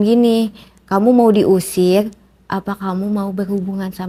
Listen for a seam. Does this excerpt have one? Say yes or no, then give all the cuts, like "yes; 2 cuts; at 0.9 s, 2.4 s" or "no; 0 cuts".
no; 0 cuts